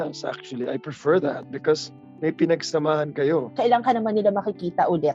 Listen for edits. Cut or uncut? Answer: cut